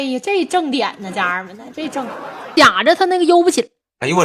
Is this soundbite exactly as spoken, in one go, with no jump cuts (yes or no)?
no